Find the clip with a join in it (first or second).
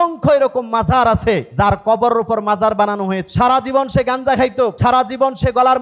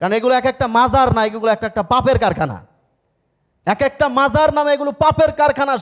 first